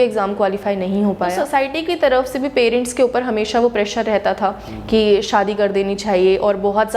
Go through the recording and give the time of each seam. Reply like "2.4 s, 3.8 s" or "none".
1.4 s

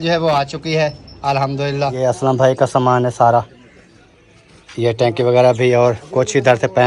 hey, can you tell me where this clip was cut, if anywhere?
1.9 s

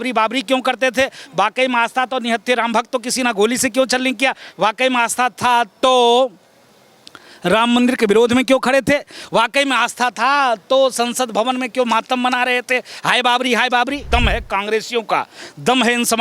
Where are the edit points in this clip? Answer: 14.0 s

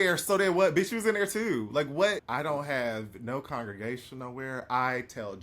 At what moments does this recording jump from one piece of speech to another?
2.2 s

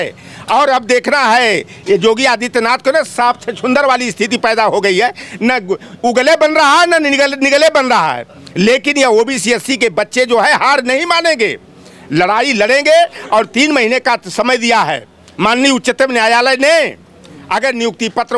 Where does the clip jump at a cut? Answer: none

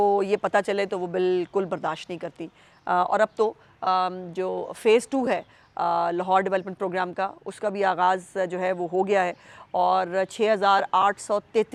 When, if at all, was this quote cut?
none

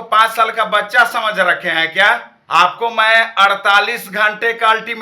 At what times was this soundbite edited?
2.3 s

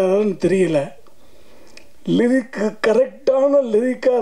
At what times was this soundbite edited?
none

